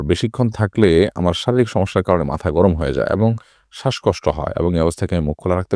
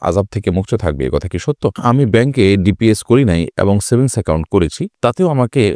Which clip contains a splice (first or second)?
second